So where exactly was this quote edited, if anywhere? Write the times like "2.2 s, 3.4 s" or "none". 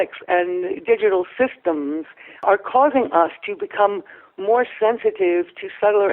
2.4 s

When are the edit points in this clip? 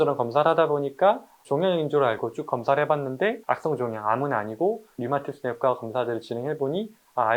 3.4 s

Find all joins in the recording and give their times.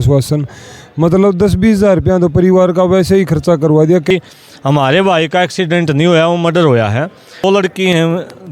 4.1 s, 7.4 s

